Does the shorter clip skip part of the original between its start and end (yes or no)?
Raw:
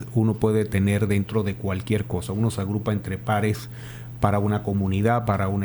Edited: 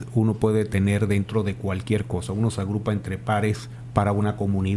yes